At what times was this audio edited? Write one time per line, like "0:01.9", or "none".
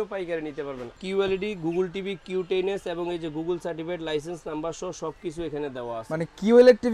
0:01.0